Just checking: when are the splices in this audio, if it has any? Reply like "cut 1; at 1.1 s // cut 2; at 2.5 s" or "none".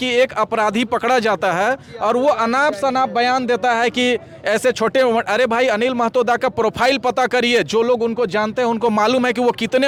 none